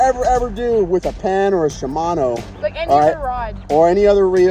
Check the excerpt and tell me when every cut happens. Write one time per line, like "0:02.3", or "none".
none